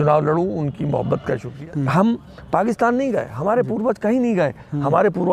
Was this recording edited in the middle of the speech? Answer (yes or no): yes